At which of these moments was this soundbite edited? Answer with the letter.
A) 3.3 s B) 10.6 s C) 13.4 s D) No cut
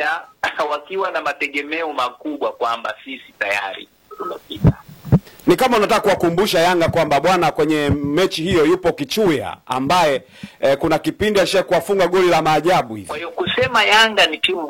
C